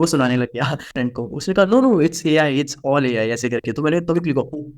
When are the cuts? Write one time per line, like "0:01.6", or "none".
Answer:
0:00.9